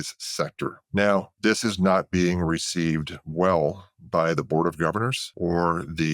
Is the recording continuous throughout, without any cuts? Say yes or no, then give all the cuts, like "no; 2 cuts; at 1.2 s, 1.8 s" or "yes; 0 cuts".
no; 3 cuts; at 0.8 s, 1.3 s, 5.2 s